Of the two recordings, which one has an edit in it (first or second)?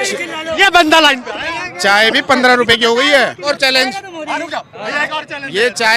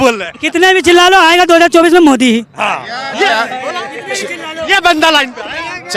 first